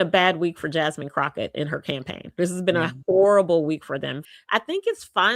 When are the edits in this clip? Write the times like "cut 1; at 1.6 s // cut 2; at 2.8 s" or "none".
cut 1; at 4.2 s